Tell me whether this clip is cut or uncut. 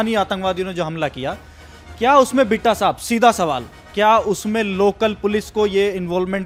uncut